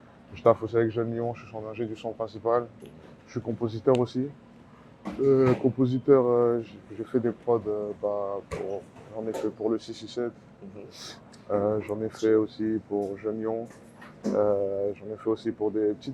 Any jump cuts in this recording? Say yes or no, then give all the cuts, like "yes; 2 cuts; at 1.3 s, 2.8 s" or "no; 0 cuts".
no; 0 cuts